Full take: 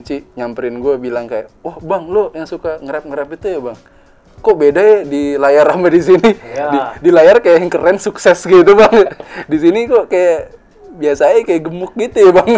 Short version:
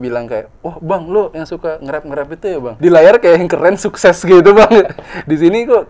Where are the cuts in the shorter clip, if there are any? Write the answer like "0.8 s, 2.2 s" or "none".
2.7 s